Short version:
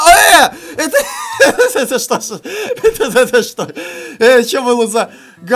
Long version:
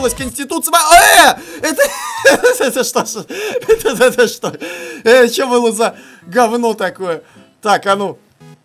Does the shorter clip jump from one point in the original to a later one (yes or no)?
no